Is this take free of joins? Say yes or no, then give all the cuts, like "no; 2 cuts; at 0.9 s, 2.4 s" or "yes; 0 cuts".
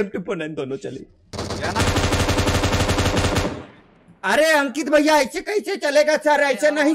no; 1 cut; at 1.3 s